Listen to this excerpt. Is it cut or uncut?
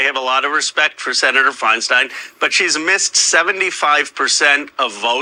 uncut